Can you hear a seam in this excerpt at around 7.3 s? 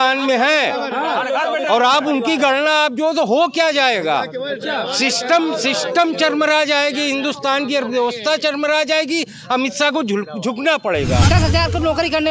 no; 1 cut; at 11.2 s

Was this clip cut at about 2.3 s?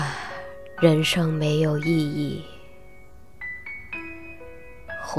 no; 1 cut; at 3.6 s

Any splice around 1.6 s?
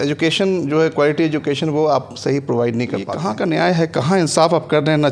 no; 1 cut; at 3.1 s

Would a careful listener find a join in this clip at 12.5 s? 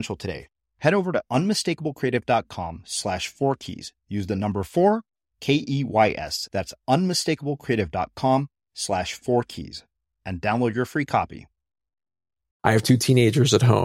yes; 1 cut; at 12.5 s

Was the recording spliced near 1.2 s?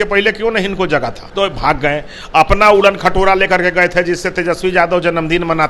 yes; 1 cut; at 1.2 s

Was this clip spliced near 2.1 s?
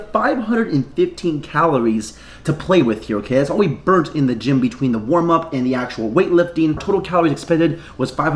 no; 0 cuts

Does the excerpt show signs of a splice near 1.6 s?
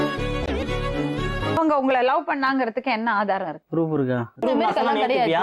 yes; 1 cut; at 1.6 s

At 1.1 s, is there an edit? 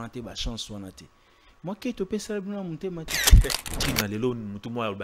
no; 1 cut; at 3.7 s

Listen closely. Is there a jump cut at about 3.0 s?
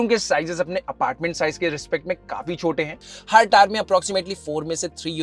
yes; 1 cut; at 3.0 s

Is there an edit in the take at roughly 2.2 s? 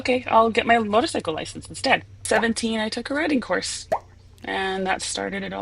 yes; 1 cut; at 2.2 s

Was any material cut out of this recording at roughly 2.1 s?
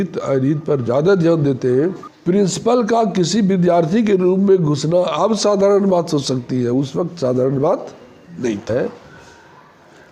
yes; 2 cuts; at 2.1 s, 8.7 s

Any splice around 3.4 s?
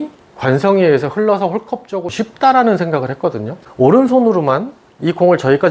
no; 1 cut; at 2.1 s

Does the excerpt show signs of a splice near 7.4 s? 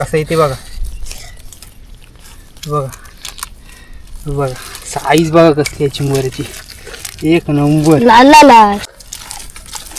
no; 1 cut; at 9.0 s

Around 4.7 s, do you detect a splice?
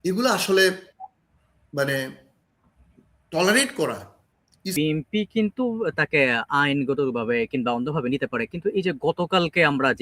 yes; 1 cut; at 4.7 s

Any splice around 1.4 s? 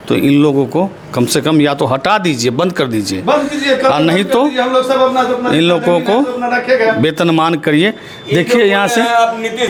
no; 0 cuts

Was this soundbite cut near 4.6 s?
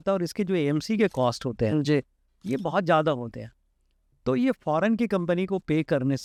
no; 0 cuts

